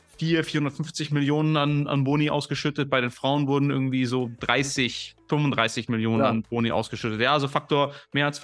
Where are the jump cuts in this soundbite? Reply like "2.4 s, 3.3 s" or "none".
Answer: none